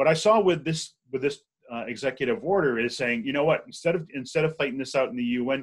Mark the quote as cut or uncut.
uncut